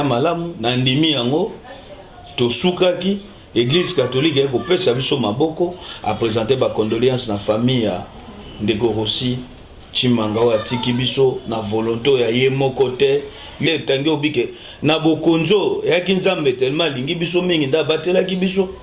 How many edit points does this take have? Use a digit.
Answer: 2